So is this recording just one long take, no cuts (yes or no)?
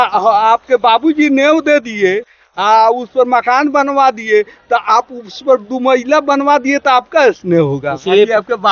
yes